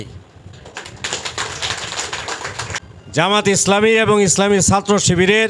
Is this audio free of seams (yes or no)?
no